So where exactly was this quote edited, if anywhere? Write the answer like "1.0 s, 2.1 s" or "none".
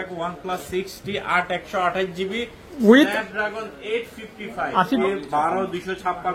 5.0 s